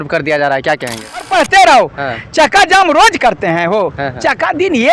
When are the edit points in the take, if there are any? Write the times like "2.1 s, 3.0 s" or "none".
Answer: 1.3 s